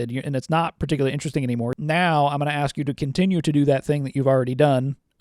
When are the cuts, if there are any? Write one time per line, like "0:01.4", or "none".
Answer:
0:01.7